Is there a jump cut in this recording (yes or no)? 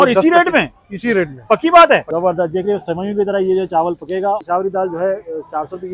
yes